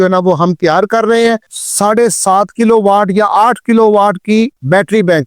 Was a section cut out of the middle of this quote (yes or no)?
yes